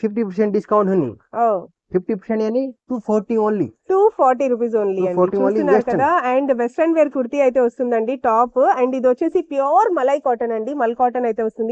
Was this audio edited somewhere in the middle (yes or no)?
no